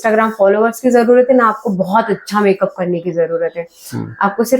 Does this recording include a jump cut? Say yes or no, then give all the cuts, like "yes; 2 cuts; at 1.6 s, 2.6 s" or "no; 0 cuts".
no; 0 cuts